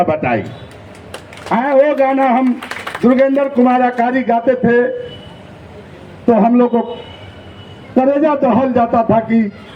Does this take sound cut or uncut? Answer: uncut